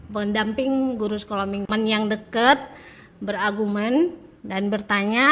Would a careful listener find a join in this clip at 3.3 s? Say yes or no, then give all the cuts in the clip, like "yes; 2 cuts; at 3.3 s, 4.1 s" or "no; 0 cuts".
no; 1 cut; at 1.8 s